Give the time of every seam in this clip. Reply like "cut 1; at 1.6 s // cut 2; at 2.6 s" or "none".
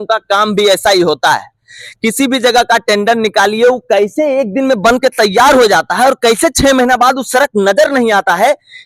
none